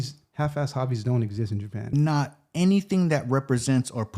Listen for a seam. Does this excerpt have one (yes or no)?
yes